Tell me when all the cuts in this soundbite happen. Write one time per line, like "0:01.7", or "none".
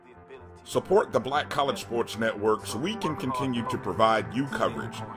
0:01.4